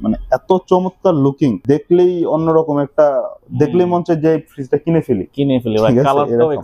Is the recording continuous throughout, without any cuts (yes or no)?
no